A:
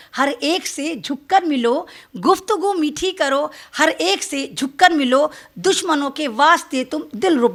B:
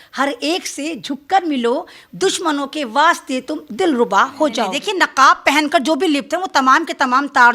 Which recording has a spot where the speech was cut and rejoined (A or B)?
B